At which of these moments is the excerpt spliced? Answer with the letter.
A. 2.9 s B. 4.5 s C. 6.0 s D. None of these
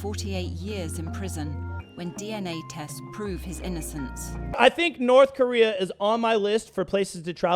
B